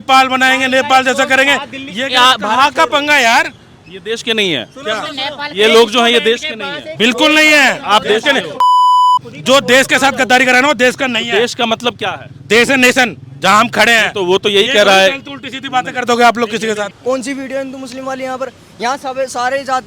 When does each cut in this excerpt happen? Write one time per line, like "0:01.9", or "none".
0:16.9